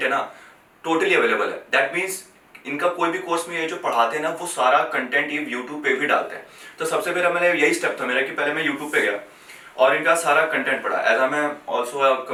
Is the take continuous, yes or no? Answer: yes